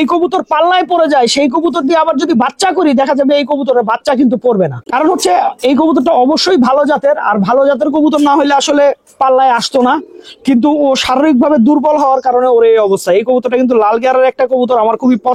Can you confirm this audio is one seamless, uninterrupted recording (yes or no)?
yes